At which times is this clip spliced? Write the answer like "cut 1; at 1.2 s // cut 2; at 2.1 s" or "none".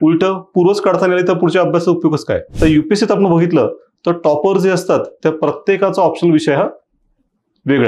cut 1; at 2.5 s